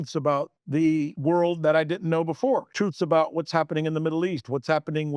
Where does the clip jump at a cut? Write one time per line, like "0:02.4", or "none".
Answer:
0:01.1
0:02.7